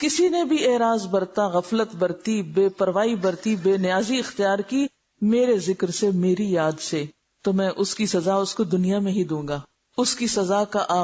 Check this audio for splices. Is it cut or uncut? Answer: uncut